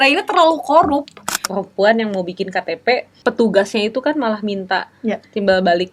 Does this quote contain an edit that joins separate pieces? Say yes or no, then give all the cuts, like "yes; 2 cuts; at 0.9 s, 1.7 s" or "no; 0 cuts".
yes; 2 cuts; at 1.5 s, 3.1 s